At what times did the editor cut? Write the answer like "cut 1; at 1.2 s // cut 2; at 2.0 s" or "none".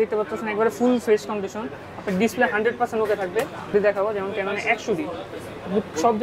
cut 1; at 3.7 s